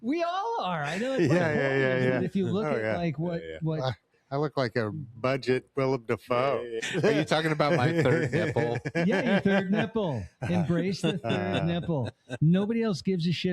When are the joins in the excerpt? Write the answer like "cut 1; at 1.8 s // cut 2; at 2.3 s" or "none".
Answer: cut 1; at 6.7 s

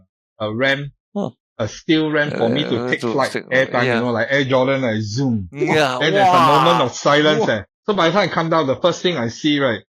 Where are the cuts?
cut 1; at 7.7 s

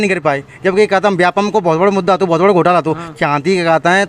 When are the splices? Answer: none

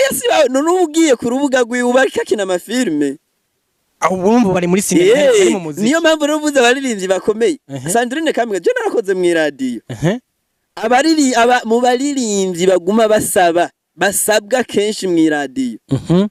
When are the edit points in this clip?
none

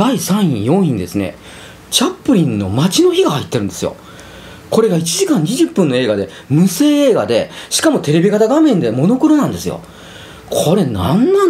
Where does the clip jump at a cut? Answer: none

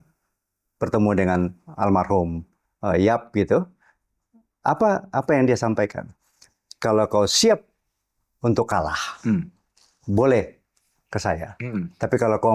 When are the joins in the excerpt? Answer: none

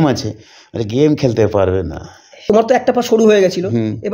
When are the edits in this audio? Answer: cut 1; at 2.4 s

